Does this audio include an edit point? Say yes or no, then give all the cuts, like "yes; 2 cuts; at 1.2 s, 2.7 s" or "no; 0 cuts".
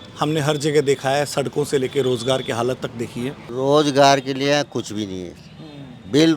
yes; 1 cut; at 3.4 s